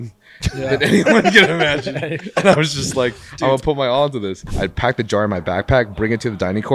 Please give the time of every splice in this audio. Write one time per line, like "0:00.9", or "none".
0:04.4